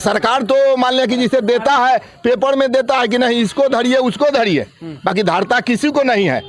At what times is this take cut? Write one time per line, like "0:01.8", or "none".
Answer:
none